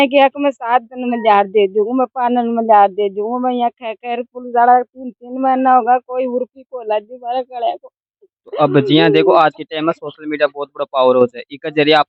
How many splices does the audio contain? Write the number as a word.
zero